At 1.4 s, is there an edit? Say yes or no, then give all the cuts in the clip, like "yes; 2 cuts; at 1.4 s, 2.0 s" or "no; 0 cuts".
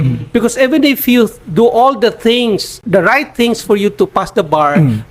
no; 1 cut; at 2.7 s